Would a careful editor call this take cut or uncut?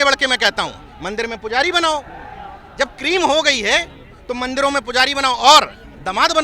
uncut